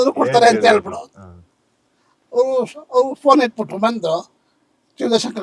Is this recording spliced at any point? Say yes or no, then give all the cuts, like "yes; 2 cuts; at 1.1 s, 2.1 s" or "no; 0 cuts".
no; 0 cuts